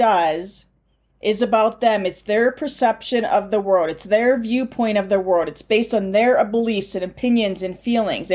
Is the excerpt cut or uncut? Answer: uncut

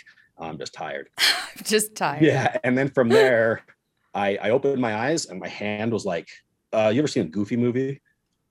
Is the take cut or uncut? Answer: cut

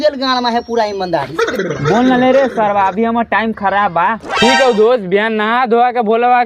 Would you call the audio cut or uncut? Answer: uncut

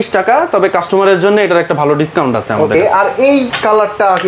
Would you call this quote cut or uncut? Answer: uncut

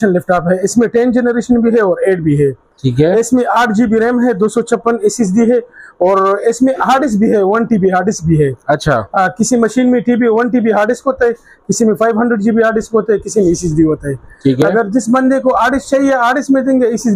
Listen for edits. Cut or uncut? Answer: uncut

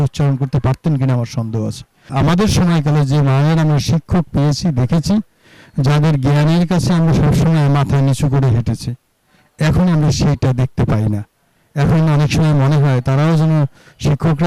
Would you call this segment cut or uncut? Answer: cut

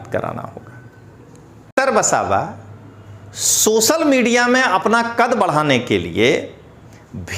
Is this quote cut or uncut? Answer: cut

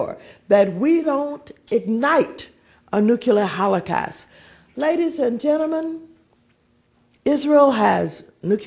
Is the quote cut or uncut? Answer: uncut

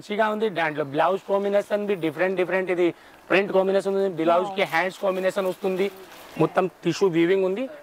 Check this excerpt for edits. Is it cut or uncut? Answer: cut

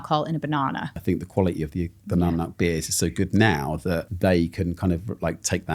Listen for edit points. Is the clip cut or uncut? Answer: cut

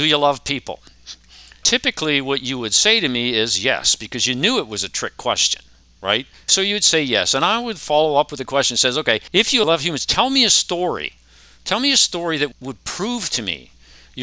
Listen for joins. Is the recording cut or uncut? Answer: cut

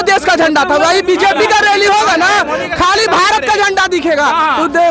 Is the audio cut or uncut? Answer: uncut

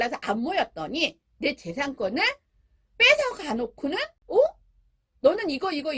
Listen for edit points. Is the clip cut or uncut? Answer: cut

